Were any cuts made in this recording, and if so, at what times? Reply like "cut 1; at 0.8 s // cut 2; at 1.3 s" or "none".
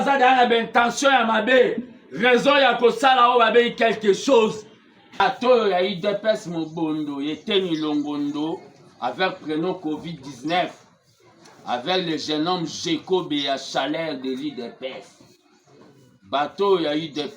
cut 1; at 5.2 s